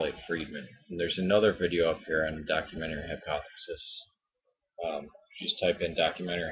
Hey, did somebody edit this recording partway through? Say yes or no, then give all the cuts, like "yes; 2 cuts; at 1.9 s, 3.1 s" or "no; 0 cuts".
no; 0 cuts